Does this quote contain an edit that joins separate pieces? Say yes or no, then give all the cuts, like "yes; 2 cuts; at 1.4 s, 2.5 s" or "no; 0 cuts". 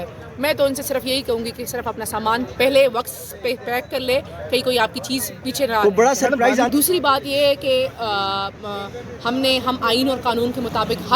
yes; 1 cut; at 6.7 s